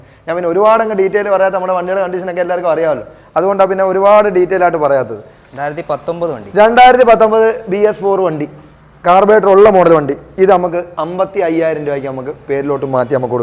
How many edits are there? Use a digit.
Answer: 0